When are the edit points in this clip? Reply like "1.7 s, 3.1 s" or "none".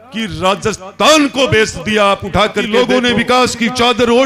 2.7 s